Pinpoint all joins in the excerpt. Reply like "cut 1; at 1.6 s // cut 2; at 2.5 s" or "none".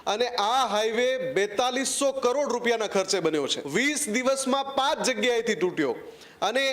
cut 1; at 3.6 s